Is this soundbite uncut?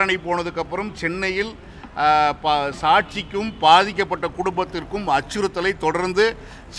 yes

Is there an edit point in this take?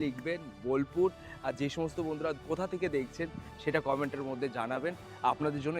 yes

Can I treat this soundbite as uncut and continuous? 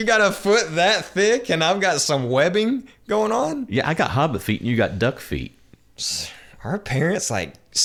yes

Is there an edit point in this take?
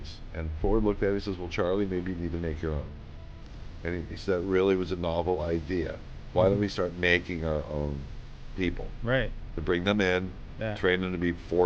no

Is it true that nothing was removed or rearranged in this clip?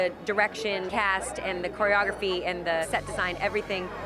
no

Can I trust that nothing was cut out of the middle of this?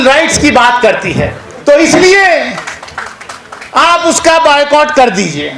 no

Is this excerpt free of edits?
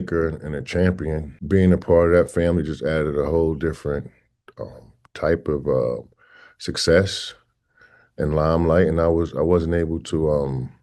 no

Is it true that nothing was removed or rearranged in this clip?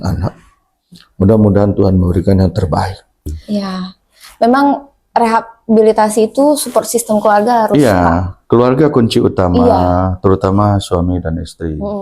no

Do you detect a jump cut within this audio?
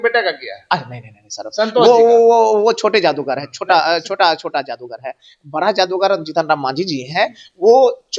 no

